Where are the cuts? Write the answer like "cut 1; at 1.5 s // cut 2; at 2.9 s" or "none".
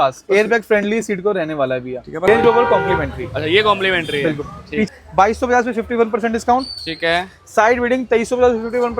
cut 1; at 2.3 s // cut 2; at 4.9 s